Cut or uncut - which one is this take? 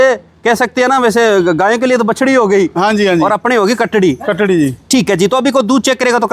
uncut